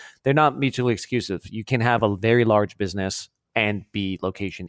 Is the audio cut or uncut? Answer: cut